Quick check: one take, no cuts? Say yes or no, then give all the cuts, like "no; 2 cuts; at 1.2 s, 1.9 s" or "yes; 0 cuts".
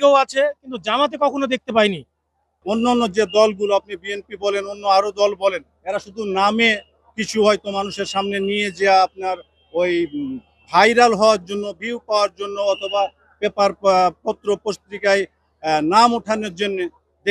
no; 1 cut; at 2.6 s